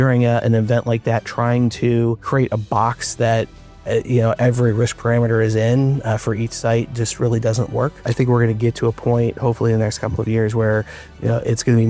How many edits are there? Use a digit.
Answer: 2